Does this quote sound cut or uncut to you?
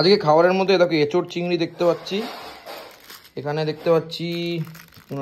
uncut